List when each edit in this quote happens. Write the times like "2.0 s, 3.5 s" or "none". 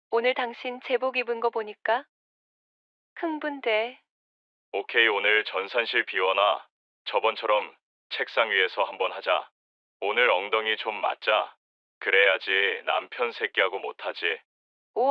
none